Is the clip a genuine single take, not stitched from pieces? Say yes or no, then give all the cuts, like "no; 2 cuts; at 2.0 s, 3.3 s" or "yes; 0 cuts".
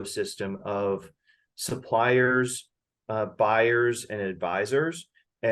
yes; 0 cuts